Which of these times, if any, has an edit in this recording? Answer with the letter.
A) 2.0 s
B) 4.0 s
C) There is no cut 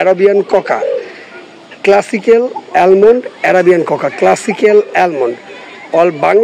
C